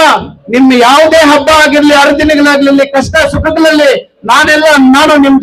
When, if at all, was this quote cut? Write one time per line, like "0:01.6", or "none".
none